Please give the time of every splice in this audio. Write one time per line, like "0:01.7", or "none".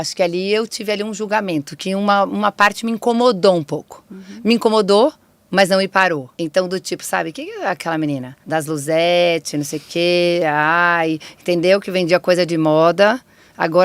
0:06.3
0:08.3